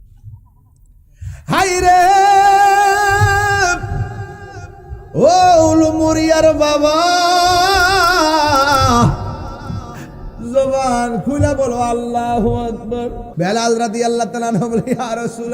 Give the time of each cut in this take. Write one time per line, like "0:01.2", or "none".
0:13.2